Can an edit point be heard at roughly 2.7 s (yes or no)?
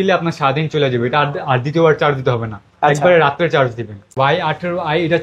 no